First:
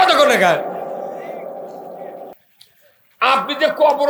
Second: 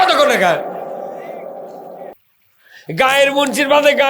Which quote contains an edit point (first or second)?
second